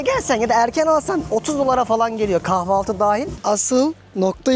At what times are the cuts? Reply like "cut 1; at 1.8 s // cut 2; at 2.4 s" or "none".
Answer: cut 1; at 3.3 s